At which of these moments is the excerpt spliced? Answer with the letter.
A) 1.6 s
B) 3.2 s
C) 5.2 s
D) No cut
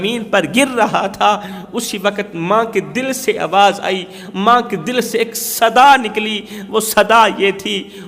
D